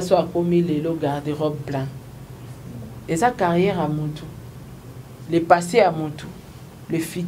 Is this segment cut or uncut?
uncut